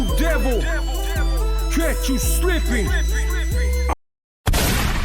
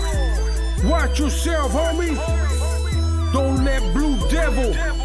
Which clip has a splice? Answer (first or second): first